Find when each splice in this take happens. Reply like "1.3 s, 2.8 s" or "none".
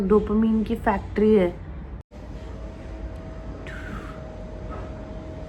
none